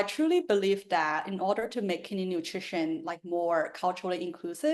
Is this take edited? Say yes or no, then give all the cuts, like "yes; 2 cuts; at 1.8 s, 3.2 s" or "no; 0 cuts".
no; 0 cuts